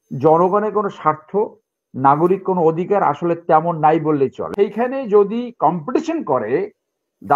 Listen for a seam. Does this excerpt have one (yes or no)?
yes